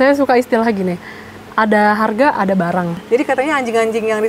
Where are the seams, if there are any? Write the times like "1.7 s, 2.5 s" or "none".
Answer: 3.0 s